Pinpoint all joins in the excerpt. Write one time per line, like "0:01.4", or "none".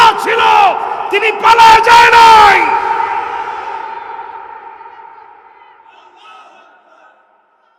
none